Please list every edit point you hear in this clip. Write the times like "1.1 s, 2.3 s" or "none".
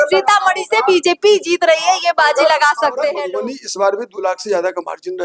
3.2 s